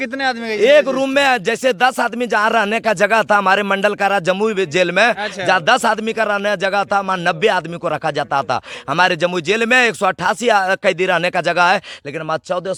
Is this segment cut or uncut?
uncut